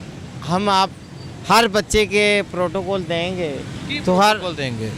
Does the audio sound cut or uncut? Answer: uncut